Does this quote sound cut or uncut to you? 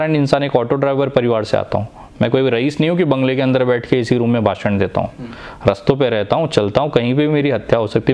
uncut